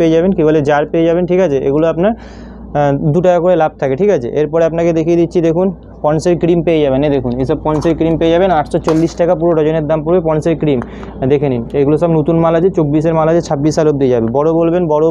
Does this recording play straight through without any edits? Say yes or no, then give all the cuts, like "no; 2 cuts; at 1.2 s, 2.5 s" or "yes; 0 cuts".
yes; 0 cuts